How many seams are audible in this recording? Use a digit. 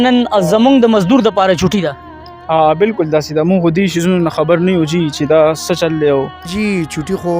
1